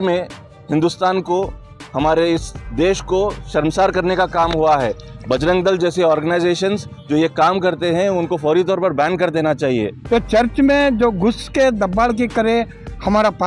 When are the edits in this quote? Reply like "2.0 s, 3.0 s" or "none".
5.1 s, 9.9 s